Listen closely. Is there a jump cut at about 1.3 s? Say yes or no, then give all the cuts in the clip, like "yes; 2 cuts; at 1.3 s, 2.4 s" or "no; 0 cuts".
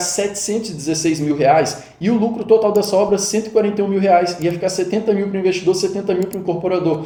no; 0 cuts